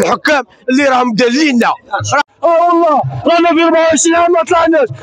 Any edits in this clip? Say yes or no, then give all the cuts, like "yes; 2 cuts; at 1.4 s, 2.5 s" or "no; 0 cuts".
yes; 1 cut; at 2.2 s